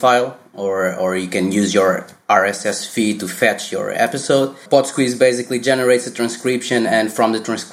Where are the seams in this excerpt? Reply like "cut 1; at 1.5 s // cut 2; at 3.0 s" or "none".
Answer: cut 1; at 4.6 s